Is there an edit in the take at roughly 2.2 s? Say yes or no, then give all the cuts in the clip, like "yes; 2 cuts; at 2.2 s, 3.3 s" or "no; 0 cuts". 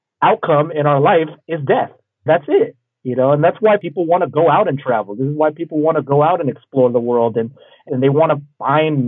yes; 3 cuts; at 2.2 s, 3.8 s, 7.8 s